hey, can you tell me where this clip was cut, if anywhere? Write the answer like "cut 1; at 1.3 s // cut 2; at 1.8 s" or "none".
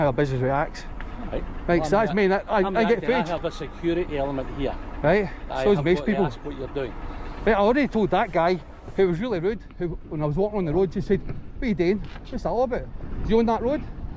none